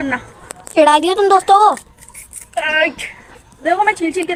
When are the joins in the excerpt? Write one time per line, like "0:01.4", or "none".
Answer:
none